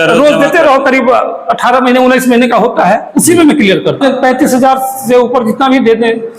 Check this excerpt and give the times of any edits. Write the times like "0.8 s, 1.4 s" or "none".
4.0 s